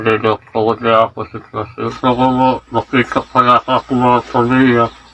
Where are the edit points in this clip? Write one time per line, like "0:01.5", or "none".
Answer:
0:01.7